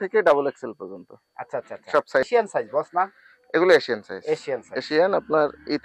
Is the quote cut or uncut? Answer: cut